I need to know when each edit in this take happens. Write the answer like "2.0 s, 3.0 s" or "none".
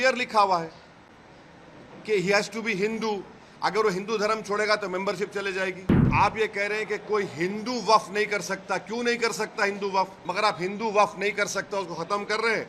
6.1 s, 10.2 s